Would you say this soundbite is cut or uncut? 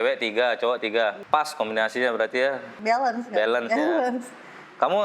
cut